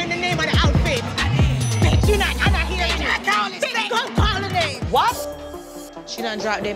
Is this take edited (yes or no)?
yes